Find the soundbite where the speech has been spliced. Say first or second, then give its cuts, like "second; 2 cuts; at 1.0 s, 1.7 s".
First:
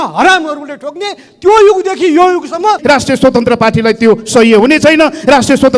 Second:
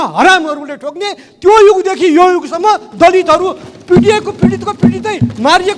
first; 1 cut; at 2.8 s